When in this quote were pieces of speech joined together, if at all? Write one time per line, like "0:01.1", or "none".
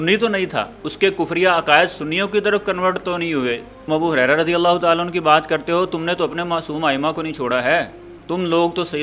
0:03.7

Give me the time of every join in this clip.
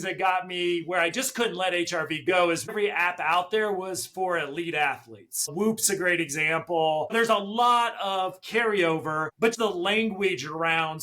0:02.7
0:07.1
0:09.5

